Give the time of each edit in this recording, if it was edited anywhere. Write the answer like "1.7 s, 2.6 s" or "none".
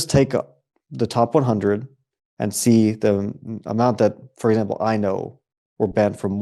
none